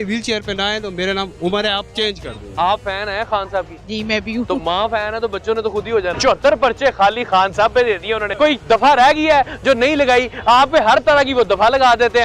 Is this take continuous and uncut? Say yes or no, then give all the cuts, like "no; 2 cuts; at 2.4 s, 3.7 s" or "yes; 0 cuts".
no; 3 cuts; at 2.5 s, 6.1 s, 8.3 s